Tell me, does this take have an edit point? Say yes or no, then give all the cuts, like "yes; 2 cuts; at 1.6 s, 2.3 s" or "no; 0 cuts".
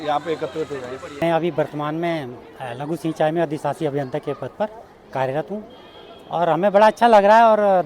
yes; 1 cut; at 1.2 s